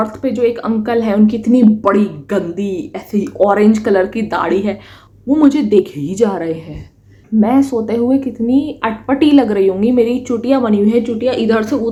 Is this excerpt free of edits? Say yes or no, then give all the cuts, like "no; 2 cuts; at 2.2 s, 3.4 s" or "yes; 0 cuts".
yes; 0 cuts